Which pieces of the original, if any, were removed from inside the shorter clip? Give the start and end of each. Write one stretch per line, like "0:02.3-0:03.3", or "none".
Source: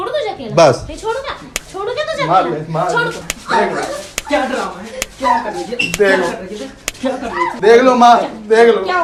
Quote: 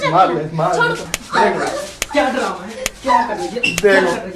none